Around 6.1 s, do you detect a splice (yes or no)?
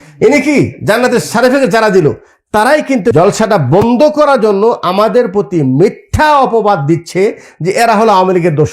no